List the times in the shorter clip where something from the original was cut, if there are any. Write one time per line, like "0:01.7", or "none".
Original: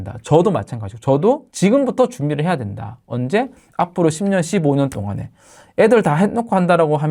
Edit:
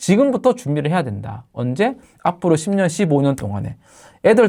none